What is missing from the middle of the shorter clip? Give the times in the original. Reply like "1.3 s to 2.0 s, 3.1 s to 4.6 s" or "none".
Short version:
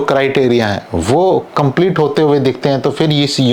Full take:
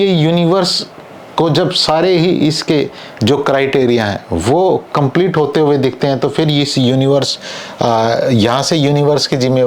none